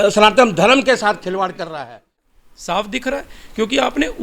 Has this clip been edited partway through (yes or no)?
yes